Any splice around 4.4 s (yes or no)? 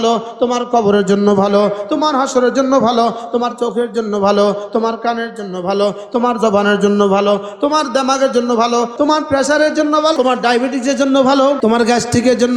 no